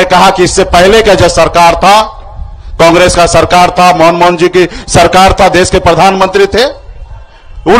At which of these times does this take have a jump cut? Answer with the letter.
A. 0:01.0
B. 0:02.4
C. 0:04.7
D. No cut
D